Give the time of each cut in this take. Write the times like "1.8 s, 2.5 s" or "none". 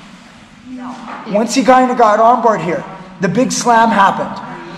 1.1 s